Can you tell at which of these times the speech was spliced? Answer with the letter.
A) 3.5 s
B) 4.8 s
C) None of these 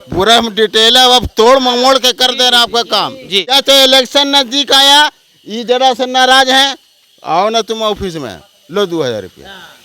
A